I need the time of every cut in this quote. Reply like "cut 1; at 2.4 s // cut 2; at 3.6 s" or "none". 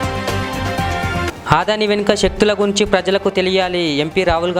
cut 1; at 1.3 s